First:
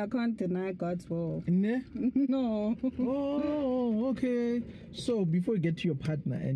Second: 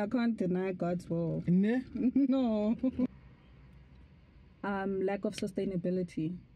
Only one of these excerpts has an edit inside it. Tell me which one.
second; 1 cut; at 3.1 s

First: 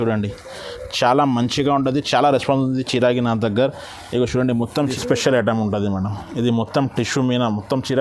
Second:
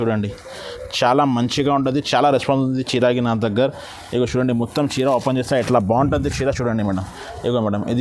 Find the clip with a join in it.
first; 1 cut; at 4.9 s

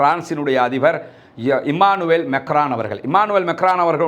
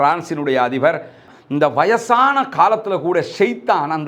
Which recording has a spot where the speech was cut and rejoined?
second; 1 cut; at 1.3 s

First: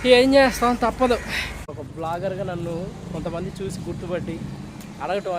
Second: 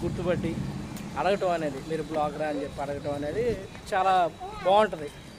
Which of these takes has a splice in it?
first; 1 cut; at 1.8 s

